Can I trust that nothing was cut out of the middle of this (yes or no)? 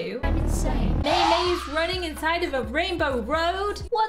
no